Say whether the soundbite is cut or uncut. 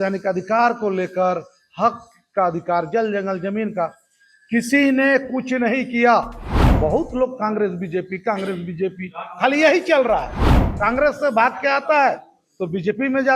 cut